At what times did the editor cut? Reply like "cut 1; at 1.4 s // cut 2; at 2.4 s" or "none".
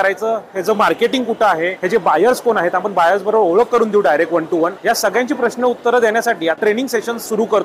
cut 1; at 1.8 s // cut 2; at 4.8 s // cut 3; at 6.7 s